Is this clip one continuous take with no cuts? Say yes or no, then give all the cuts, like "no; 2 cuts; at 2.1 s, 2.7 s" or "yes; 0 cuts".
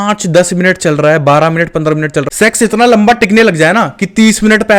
no; 1 cut; at 2.2 s